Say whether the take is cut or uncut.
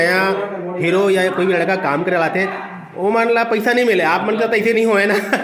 uncut